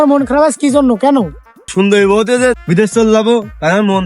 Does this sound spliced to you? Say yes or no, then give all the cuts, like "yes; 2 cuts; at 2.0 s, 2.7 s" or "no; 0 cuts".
yes; 2 cuts; at 1.7 s, 2.6 s